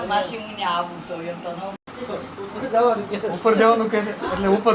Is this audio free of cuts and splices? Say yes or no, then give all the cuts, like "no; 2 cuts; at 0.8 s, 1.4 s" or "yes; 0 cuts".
no; 1 cut; at 1.8 s